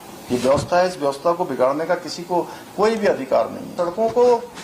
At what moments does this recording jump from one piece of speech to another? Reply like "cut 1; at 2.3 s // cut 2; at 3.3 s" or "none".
cut 1; at 3.7 s